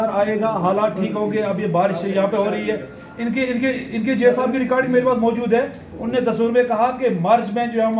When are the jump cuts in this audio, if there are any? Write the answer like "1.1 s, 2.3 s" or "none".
none